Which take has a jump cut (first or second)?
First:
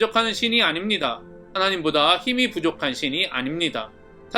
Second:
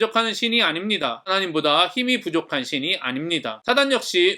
second